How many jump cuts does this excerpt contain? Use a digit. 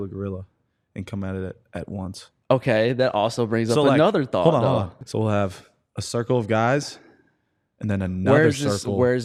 0